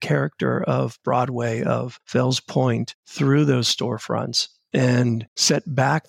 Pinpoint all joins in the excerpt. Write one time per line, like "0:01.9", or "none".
0:02.0